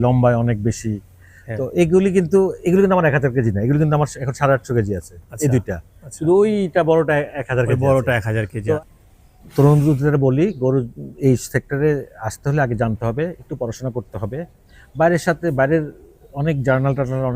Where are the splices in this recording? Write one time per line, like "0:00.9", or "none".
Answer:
0:08.8